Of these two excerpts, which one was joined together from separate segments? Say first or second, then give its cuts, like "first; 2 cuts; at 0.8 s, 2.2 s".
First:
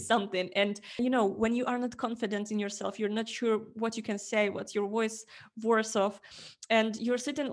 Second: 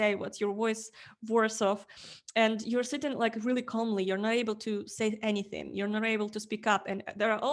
first; 1 cut; at 0.9 s